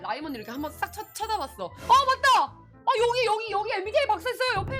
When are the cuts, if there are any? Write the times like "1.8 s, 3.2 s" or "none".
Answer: 1.8 s